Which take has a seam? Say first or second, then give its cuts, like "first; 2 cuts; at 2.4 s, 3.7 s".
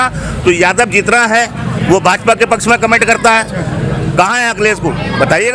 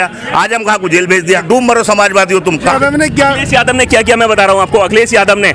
second; 2 cuts; at 1.4 s, 2.7 s